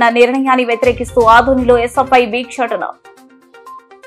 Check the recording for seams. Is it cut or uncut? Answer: uncut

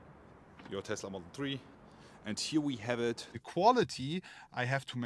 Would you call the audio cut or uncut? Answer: cut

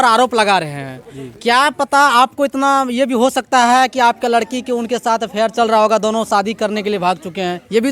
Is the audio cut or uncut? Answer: uncut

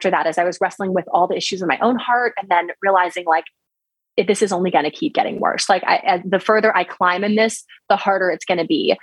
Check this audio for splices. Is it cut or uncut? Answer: uncut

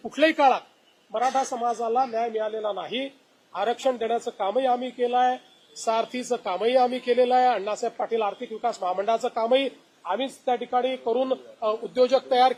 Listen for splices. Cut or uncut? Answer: uncut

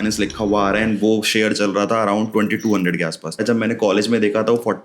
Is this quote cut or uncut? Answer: cut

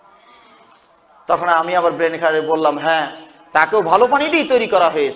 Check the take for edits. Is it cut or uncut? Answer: cut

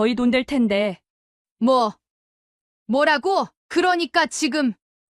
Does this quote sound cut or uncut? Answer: cut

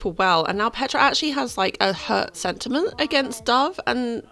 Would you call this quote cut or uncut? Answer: uncut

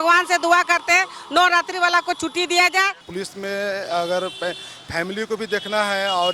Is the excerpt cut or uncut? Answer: cut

